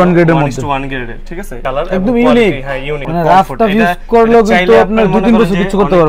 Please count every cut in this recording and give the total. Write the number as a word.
one